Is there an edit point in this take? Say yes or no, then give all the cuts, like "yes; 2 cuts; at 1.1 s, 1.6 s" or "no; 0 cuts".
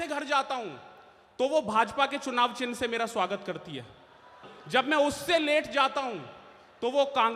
yes; 1 cut; at 4.5 s